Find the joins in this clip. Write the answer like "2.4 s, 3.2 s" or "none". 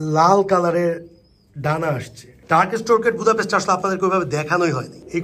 2.3 s